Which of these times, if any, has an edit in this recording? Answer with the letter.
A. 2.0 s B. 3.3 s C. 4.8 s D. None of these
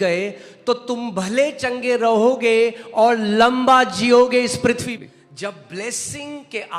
C